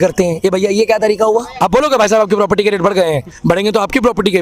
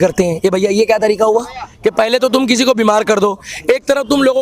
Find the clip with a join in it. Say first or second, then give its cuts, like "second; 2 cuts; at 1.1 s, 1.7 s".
first; 1 cut; at 1.5 s